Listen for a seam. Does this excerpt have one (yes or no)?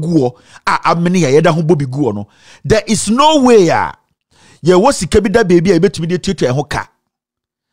no